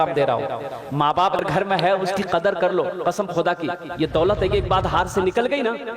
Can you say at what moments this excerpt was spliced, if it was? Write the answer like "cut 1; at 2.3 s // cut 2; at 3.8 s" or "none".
cut 1; at 1.4 s